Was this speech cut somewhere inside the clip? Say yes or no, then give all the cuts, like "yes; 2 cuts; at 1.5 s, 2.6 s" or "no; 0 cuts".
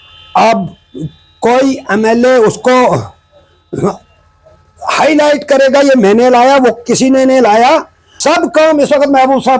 yes; 1 cut; at 8.1 s